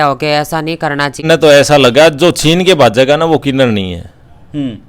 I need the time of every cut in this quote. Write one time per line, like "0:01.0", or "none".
0:01.2